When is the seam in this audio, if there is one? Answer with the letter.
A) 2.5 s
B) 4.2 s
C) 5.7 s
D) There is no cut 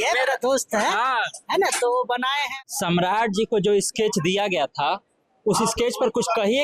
A